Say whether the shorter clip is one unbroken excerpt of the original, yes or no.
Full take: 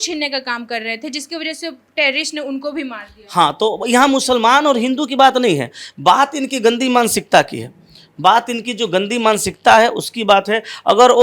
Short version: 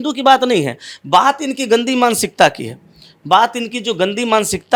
yes